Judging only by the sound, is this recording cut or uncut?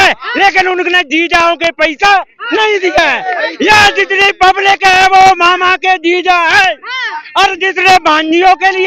uncut